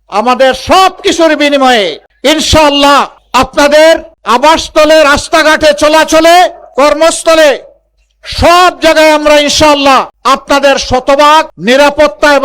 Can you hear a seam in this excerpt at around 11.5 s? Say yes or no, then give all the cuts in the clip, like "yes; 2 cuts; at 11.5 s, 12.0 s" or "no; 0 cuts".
yes; 2 cuts; at 10.1 s, 11.5 s